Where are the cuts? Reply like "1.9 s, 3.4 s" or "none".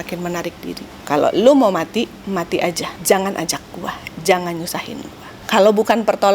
0.9 s, 2.9 s, 5.4 s